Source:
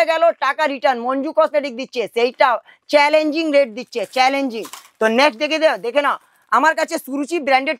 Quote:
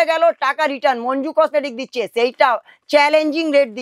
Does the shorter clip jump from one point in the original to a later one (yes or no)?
no